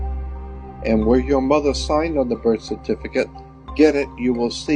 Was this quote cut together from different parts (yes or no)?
no